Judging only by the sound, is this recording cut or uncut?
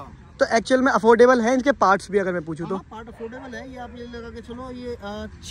uncut